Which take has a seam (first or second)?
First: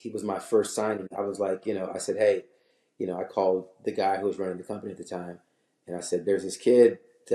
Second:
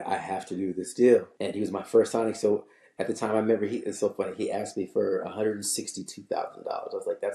second